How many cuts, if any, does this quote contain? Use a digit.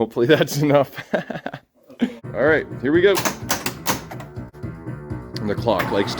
2